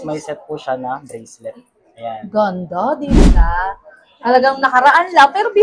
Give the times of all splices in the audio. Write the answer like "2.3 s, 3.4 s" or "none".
3.2 s